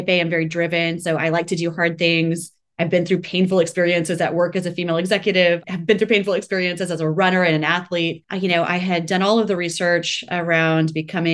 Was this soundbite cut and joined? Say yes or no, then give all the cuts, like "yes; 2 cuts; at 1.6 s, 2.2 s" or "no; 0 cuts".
yes; 2 cuts; at 5.6 s, 8.2 s